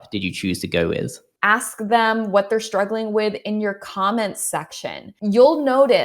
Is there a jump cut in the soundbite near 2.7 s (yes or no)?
no